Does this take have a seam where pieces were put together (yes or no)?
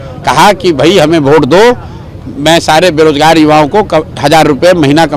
no